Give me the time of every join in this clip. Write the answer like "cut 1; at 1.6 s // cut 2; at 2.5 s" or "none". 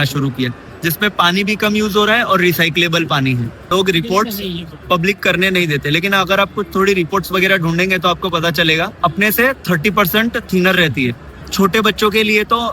cut 1; at 3.5 s // cut 2; at 8.9 s // cut 3; at 11.4 s